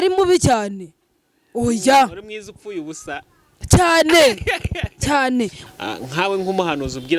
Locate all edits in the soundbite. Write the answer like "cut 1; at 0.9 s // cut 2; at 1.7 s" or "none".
cut 1; at 5.6 s